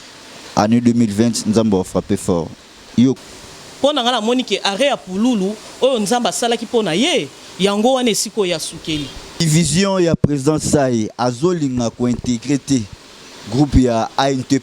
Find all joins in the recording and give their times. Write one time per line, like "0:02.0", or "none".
0:03.2
0:09.4